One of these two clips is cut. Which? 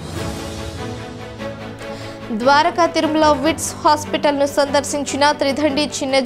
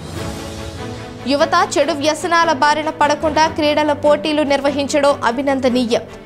second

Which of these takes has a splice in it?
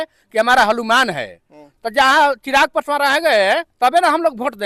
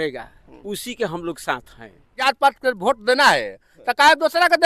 second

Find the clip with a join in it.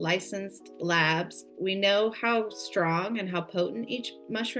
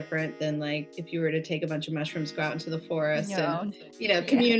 first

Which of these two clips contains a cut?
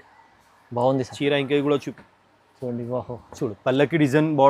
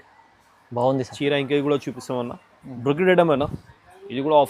first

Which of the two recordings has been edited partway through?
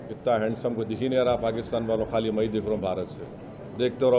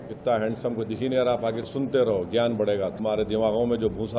second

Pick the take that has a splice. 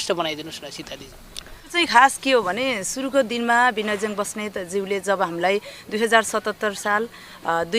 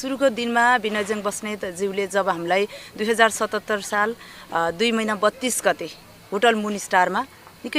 first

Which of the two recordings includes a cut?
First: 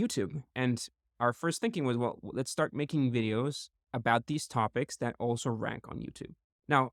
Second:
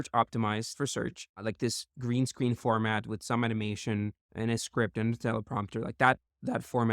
second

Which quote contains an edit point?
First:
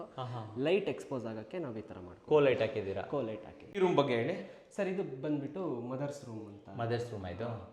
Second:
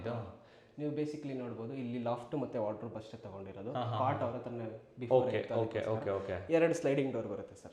first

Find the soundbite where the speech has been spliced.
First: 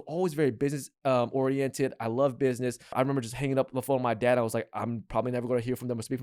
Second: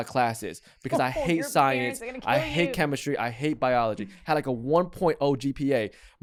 first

